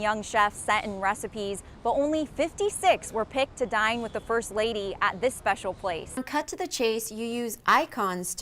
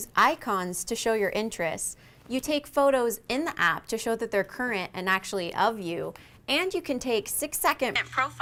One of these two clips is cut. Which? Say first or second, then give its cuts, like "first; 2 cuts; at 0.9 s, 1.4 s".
first; 1 cut; at 6.2 s